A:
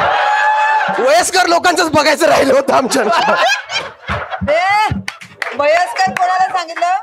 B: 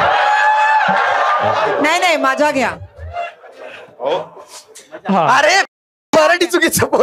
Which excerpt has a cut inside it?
A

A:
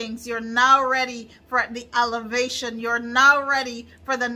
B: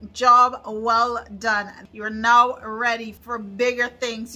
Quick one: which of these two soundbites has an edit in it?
B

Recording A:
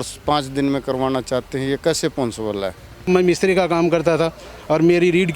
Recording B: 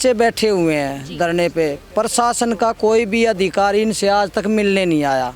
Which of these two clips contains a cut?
A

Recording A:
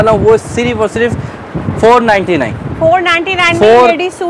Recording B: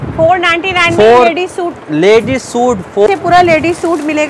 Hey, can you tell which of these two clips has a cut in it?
B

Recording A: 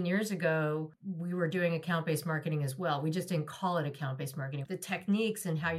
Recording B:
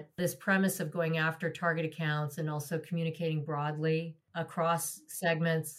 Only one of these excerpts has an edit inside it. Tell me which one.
A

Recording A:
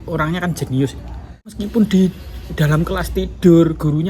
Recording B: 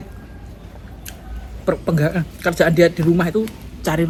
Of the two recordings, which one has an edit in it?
A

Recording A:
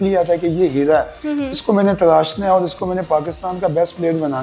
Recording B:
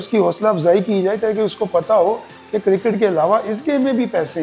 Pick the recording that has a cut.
A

